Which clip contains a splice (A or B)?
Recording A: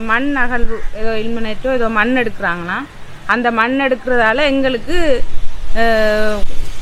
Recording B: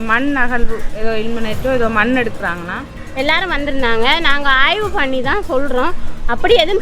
B